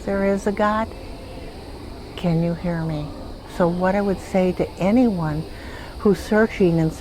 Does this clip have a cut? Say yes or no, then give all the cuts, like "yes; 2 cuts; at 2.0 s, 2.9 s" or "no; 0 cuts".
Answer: yes; 1 cut; at 3.4 s